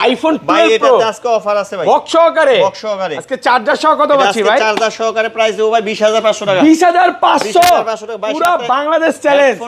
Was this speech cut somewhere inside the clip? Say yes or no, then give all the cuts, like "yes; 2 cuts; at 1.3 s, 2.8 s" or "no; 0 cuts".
no; 0 cuts